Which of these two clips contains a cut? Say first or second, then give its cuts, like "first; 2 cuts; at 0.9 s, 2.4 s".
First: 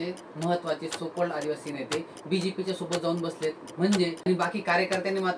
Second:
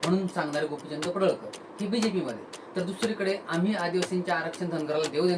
first; 1 cut; at 4.2 s